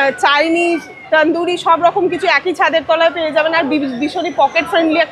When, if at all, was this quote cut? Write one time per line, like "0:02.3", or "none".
none